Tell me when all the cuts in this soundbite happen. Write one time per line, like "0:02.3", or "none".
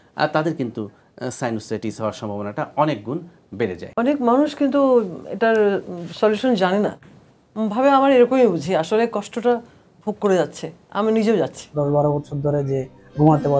0:03.8
0:11.7